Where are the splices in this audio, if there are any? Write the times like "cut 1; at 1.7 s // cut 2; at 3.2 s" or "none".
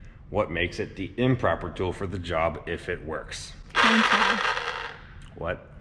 none